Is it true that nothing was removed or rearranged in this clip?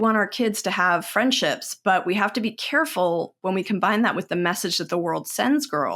yes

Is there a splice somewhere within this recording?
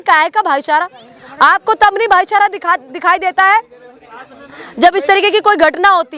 no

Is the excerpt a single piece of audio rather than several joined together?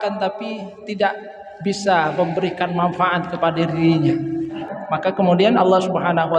no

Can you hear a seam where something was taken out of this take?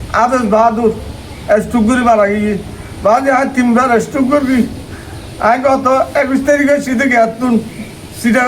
no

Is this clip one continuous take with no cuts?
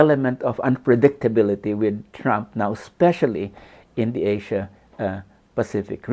yes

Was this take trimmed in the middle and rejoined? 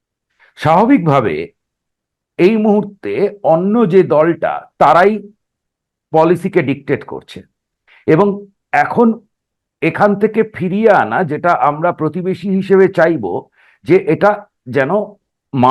no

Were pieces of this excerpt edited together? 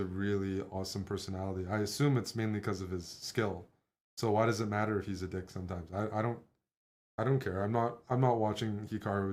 no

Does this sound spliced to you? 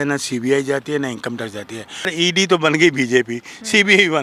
yes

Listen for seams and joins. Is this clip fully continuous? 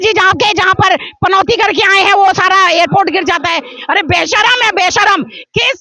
no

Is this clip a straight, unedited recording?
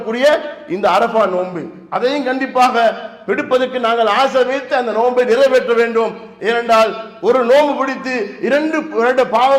yes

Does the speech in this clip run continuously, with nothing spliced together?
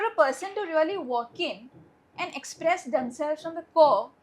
yes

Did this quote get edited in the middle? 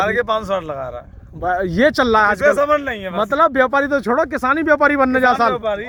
no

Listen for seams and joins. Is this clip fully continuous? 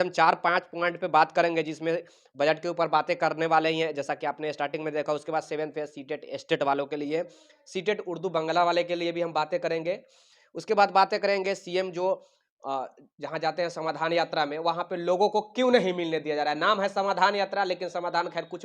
yes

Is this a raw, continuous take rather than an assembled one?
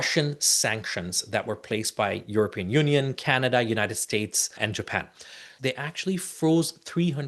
no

